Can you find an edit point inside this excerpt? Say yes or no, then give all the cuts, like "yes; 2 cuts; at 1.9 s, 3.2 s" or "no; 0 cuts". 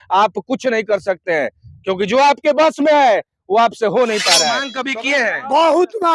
yes; 1 cut; at 4.8 s